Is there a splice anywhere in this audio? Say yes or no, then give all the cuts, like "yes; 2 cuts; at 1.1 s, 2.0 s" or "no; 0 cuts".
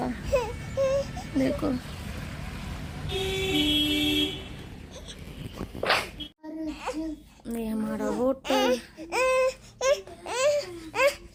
no; 0 cuts